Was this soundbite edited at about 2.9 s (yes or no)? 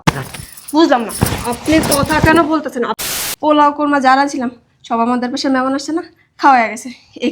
yes